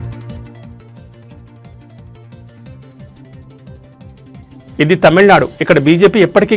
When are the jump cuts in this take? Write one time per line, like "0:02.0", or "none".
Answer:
0:04.2